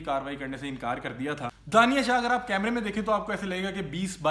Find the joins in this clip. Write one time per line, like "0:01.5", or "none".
0:01.5